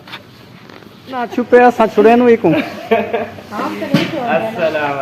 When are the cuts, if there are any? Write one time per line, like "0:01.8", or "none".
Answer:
0:01.3

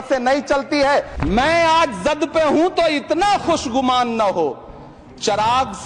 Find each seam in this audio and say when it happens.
0:01.2

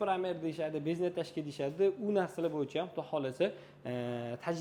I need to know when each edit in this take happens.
none

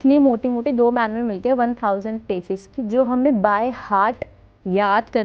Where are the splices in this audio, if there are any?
none

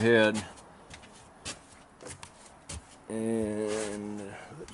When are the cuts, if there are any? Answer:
none

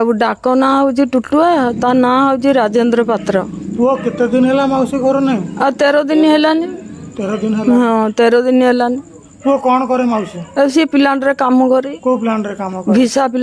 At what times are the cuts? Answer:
none

